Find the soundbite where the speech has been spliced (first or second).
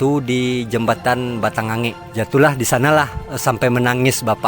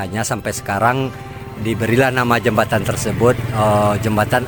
first